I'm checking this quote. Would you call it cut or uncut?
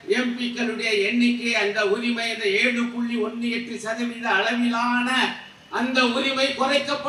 uncut